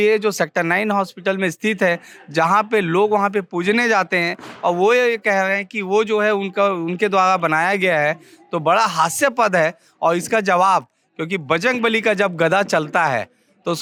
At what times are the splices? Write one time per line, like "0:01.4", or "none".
none